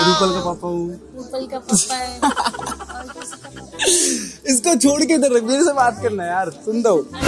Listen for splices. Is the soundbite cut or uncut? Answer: uncut